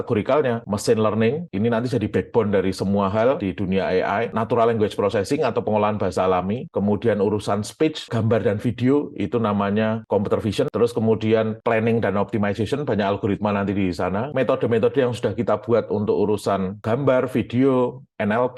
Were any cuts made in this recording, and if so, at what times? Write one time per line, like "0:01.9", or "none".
0:03.5
0:08.1
0:10.0
0:16.7

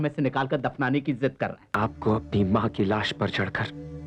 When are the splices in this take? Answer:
0:01.7

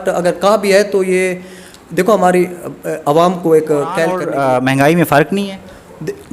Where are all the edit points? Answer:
0:04.2

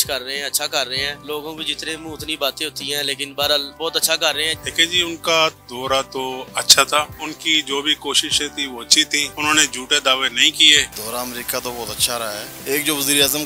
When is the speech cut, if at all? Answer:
0:01.2
0:03.7
0:04.6
0:07.1
0:09.3
0:10.9
0:12.5

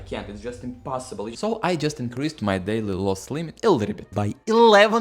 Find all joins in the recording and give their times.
0:01.3

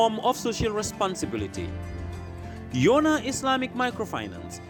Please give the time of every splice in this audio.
none

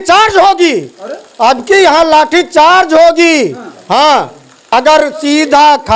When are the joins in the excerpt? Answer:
none

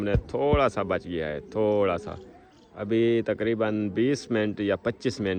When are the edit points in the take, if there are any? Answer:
none

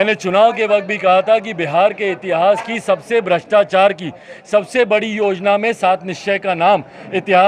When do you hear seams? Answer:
none

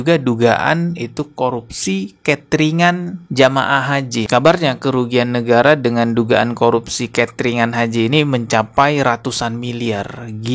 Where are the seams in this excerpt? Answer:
0:04.2

